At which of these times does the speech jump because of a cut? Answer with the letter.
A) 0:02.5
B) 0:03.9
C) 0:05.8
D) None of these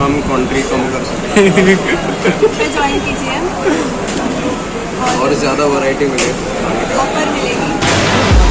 D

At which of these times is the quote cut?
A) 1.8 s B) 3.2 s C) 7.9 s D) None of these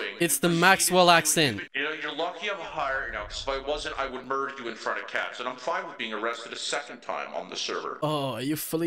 D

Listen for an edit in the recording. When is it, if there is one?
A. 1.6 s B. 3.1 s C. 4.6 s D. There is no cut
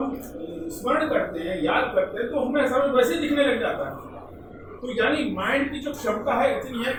D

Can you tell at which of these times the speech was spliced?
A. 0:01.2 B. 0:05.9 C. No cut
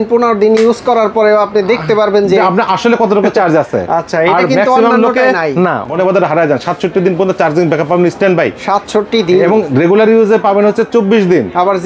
B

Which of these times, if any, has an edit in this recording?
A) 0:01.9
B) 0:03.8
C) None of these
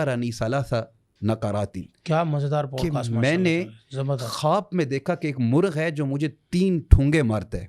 C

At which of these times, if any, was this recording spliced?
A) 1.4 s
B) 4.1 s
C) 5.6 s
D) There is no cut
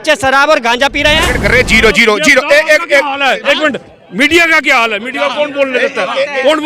A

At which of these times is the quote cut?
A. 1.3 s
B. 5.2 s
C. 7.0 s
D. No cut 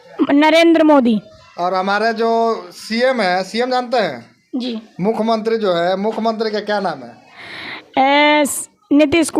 D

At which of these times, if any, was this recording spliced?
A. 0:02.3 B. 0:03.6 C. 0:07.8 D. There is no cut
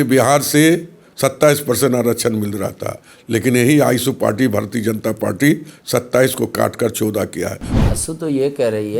C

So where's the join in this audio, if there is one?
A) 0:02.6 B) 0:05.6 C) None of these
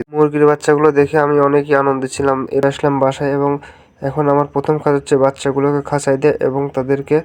A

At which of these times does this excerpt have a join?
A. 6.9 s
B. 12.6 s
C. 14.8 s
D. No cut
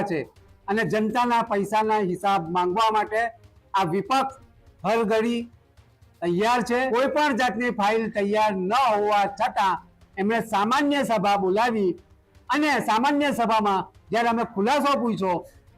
A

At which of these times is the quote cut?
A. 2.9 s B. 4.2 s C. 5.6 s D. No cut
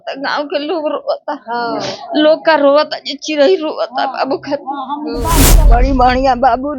C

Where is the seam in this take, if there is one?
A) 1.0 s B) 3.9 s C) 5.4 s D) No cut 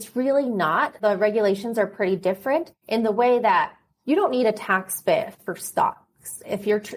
A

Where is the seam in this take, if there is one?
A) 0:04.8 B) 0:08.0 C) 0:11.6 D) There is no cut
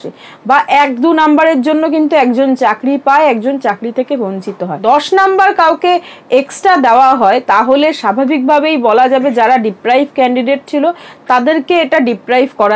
A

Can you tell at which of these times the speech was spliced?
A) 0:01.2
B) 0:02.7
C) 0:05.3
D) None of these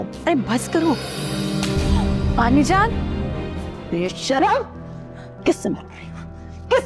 A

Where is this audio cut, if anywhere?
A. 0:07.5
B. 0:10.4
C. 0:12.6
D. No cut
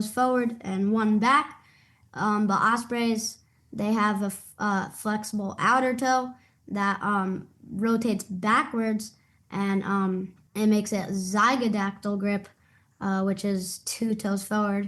B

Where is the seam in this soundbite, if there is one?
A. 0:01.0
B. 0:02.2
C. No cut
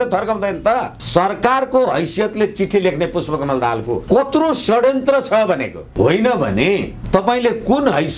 A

